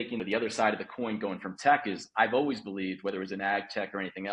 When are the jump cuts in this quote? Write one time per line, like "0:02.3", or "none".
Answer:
none